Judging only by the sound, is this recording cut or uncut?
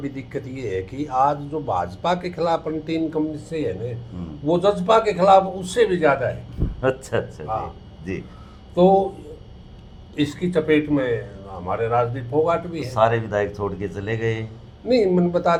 uncut